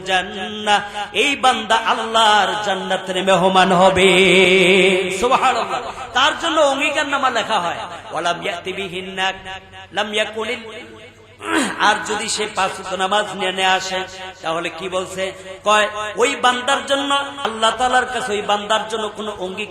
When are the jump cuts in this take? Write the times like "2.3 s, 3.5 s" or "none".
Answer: 17.4 s